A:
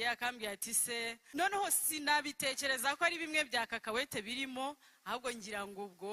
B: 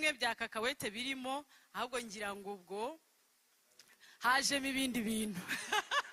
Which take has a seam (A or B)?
A